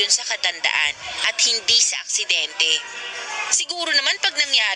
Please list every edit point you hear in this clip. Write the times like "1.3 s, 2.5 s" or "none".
none